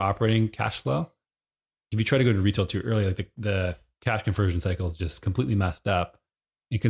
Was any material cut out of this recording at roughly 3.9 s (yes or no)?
no